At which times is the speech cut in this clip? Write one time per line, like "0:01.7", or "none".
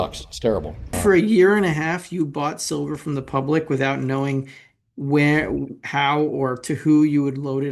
0:01.0